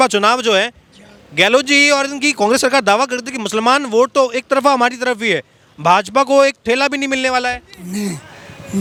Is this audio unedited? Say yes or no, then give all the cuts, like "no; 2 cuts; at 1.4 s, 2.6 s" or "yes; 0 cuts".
yes; 0 cuts